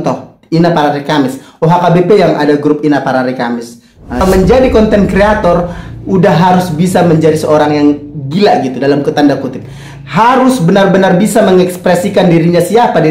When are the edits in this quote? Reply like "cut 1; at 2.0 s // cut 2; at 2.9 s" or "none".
cut 1; at 4.2 s

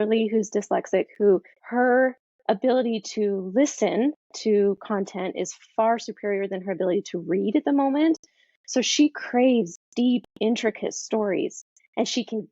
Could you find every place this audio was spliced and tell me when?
cut 1; at 1.6 s

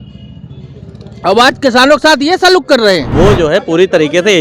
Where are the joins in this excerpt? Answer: cut 1; at 3.1 s

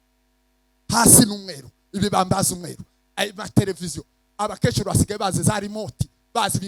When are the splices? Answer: none

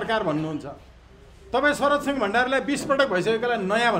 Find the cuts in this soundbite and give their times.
none

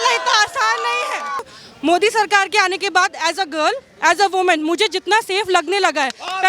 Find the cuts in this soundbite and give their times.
cut 1; at 1.6 s

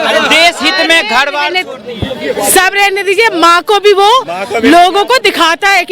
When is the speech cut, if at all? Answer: none

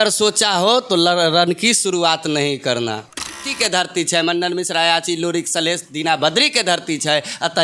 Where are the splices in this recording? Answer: cut 1; at 3.6 s

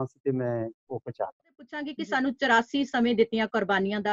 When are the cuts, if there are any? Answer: cut 1; at 1.9 s

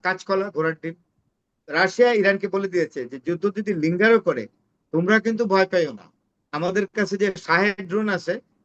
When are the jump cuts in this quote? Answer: cut 1; at 1.7 s

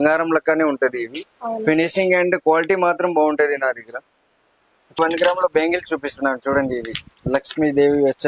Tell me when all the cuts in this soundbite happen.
cut 1; at 5.0 s

